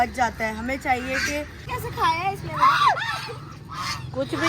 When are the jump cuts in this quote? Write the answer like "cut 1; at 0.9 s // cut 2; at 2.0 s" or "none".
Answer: cut 1; at 1.7 s